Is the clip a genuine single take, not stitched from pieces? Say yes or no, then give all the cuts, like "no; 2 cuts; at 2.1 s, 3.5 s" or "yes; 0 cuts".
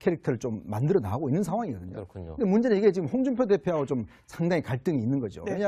yes; 0 cuts